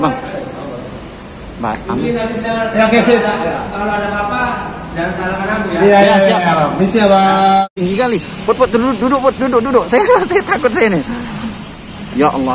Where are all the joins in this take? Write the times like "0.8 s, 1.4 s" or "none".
7.7 s